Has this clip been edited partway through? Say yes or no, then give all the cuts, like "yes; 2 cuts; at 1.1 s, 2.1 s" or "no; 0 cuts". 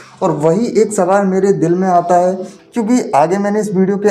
yes; 1 cut; at 2.5 s